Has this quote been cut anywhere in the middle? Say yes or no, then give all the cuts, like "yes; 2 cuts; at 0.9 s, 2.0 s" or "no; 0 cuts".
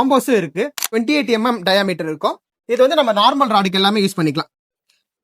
yes; 1 cut; at 1.0 s